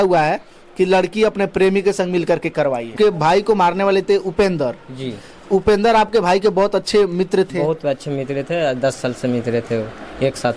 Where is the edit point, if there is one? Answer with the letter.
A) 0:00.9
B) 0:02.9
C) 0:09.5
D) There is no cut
B